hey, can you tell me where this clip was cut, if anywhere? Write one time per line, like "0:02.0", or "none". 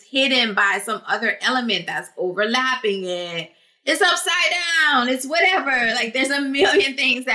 none